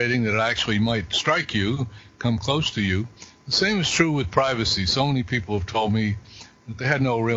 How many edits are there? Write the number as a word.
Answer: zero